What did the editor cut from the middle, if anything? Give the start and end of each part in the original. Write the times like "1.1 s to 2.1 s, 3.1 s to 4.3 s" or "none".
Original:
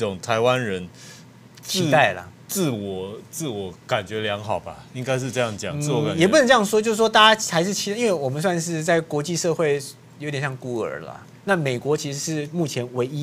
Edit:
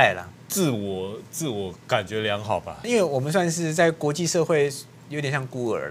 4.8 s to 7.9 s

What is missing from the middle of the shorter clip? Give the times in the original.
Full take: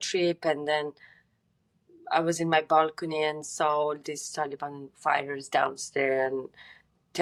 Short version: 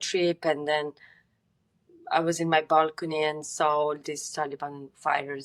none

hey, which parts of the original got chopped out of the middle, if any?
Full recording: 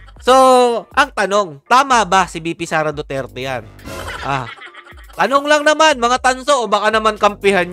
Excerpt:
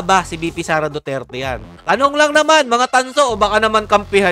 3.7 s to 5.0 s

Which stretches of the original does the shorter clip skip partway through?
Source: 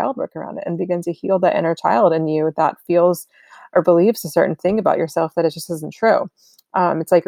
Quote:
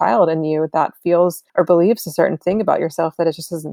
3.3 s to 3.6 s

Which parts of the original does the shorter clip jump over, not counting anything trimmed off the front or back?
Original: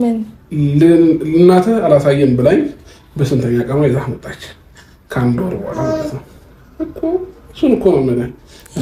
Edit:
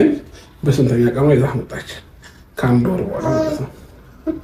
none

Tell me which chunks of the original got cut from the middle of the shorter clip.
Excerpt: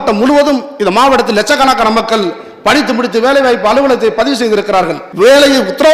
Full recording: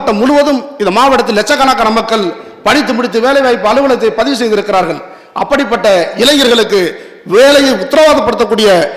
5.0 s to 7.1 s

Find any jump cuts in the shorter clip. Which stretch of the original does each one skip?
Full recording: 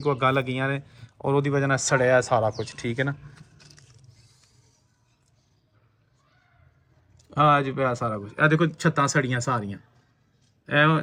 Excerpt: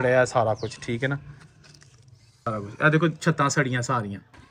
4.4 s to 8.0 s

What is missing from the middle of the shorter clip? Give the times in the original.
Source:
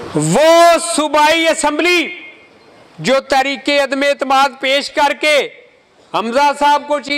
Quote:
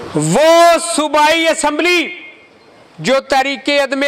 none

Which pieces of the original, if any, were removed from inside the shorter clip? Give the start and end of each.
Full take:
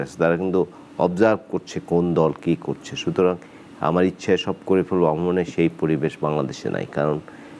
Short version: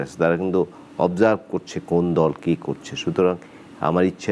none

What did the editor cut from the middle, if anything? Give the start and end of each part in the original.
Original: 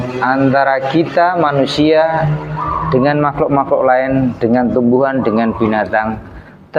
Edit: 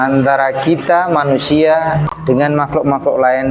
2.4 s to 2.8 s

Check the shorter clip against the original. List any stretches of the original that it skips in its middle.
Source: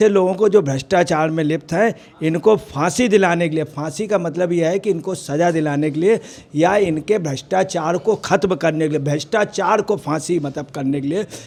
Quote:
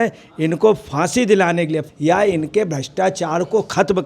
3.7 s to 6.4 s

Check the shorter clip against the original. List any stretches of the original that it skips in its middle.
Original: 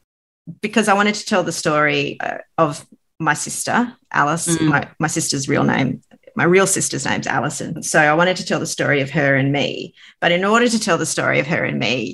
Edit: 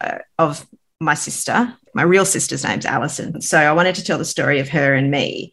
4.0 s to 6.2 s

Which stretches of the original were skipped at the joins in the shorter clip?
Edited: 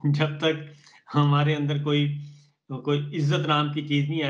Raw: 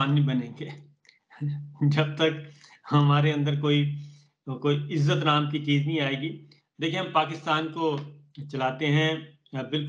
none

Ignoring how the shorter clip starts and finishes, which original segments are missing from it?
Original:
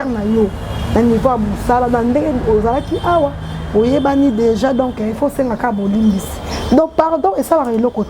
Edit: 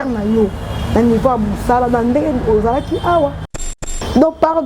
3.7 s to 6.2 s

